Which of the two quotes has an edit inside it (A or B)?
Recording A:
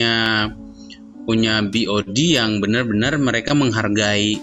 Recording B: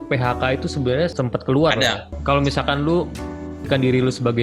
B